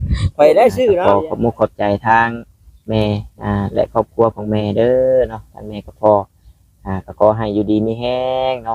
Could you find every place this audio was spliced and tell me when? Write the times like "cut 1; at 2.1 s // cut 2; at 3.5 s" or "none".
cut 1; at 1.0 s